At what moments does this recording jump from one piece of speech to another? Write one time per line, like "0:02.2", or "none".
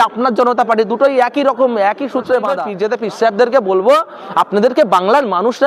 0:02.6